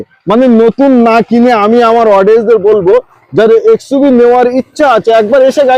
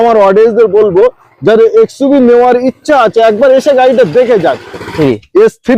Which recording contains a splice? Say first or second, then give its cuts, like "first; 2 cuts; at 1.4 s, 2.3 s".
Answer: second; 1 cut; at 4.8 s